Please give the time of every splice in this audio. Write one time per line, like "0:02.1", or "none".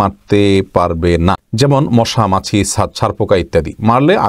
0:01.5